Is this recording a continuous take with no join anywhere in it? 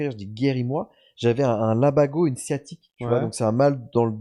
yes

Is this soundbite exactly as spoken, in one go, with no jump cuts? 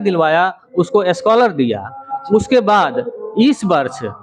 yes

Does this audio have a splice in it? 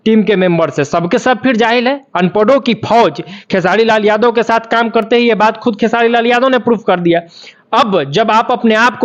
no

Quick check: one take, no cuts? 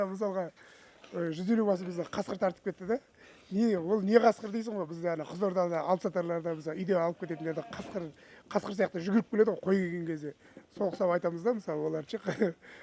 yes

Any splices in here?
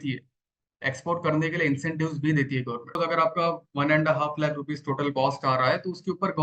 yes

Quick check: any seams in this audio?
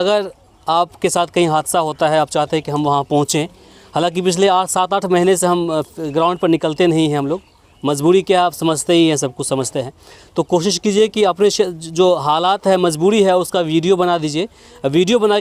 no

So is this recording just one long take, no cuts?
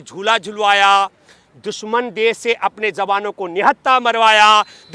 yes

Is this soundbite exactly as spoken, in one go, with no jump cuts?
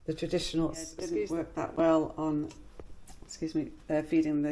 no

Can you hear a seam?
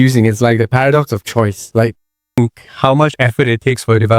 yes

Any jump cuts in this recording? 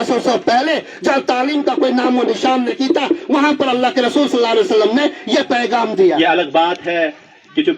yes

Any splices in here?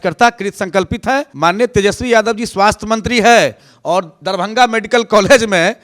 yes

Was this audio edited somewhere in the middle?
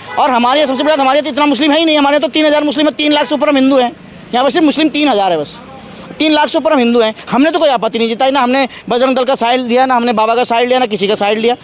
no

